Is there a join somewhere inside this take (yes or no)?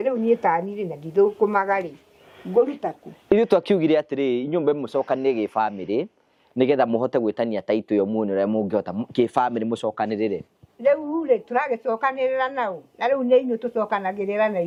no